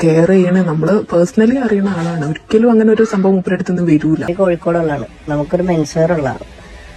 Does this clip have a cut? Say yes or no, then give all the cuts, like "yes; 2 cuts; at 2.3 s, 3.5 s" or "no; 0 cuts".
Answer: yes; 1 cut; at 4.3 s